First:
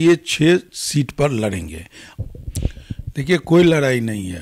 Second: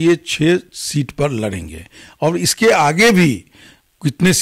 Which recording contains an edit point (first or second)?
first